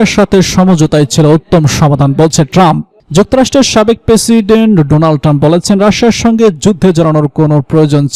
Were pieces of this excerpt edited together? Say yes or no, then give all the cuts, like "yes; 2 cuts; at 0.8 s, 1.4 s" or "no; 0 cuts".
no; 0 cuts